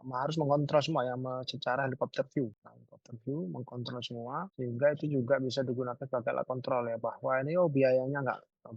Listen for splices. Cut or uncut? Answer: uncut